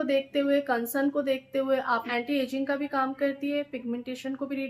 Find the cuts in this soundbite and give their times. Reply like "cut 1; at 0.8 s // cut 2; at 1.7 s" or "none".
cut 1; at 2.0 s